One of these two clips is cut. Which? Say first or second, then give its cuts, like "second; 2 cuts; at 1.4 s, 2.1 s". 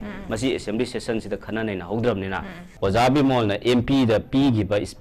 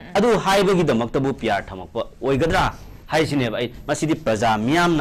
first; 1 cut; at 2.7 s